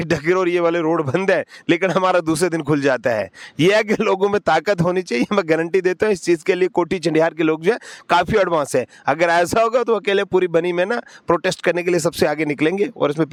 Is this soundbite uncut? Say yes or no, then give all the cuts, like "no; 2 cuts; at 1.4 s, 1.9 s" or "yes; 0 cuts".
yes; 0 cuts